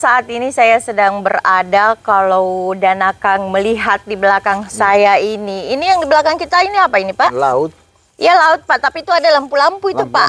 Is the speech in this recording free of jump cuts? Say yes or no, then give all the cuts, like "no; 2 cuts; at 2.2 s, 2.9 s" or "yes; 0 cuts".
yes; 0 cuts